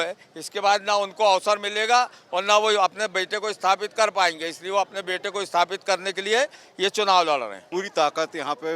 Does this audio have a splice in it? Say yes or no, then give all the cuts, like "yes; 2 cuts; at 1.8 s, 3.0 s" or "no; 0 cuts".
yes; 1 cut; at 7.6 s